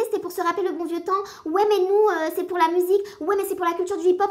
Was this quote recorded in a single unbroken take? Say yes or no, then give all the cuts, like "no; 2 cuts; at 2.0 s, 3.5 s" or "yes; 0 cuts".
yes; 0 cuts